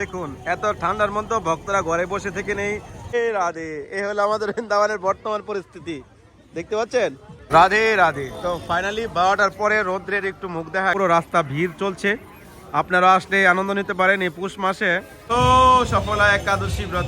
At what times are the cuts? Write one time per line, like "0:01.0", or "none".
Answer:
0:03.1
0:07.3
0:10.9
0:15.1

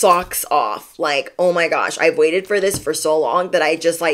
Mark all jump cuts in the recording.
none

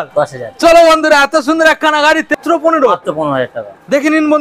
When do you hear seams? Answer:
0:02.4

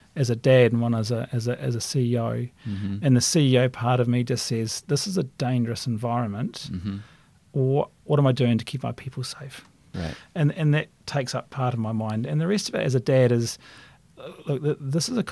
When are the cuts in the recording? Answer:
0:09.8

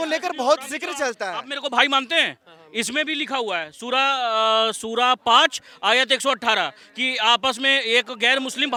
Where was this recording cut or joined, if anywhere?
none

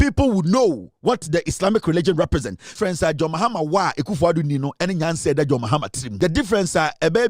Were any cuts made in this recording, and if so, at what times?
0:02.7
0:06.0

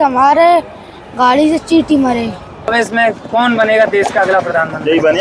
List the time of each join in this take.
0:02.7

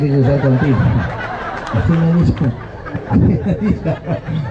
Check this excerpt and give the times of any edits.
none

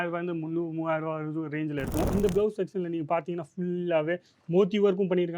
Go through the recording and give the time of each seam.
0:02.1

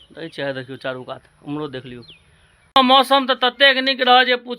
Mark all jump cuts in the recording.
0:02.8

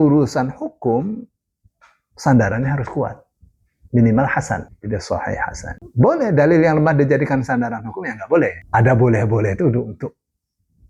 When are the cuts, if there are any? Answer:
0:04.7
0:05.9
0:08.6

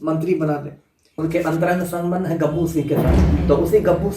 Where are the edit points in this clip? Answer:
0:01.0

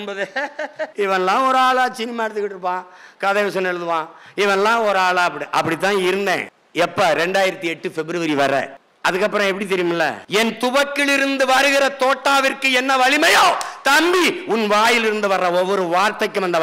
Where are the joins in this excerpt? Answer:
0:00.9
0:06.6
0:10.2

